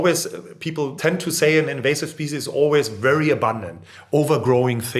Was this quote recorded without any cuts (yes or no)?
no